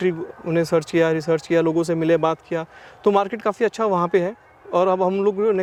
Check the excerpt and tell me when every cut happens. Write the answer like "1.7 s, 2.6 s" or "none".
none